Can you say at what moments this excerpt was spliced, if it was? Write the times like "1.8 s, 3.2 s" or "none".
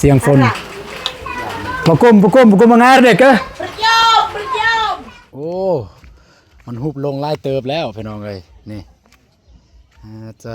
4.9 s